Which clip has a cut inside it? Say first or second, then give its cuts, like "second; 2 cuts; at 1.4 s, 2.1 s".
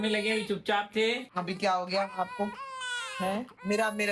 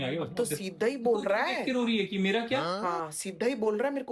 first; 1 cut; at 1.3 s